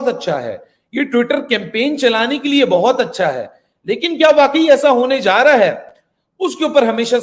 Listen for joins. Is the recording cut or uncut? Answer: uncut